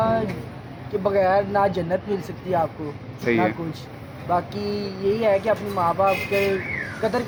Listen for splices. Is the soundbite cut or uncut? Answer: uncut